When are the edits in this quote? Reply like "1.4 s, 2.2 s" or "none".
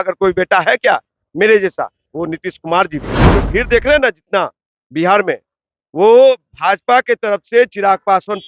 3.2 s